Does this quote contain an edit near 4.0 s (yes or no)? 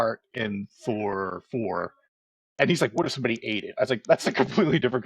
no